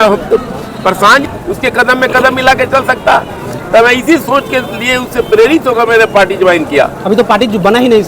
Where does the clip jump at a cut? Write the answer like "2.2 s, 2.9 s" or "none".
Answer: 1.3 s